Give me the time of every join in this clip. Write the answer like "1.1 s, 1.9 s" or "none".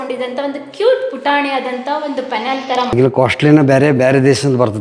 2.9 s